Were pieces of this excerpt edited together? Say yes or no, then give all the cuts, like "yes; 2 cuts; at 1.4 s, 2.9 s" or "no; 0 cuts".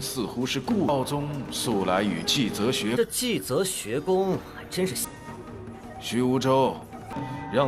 no; 0 cuts